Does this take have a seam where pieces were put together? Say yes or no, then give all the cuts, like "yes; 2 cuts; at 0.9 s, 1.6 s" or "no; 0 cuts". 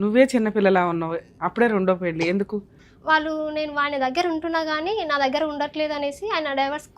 yes; 1 cut; at 2.8 s